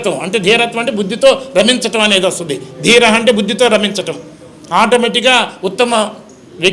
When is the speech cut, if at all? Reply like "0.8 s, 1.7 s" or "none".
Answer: none